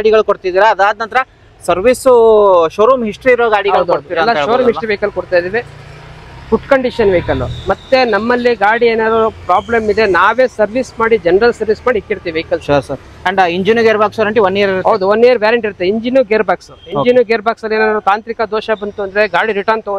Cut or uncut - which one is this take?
uncut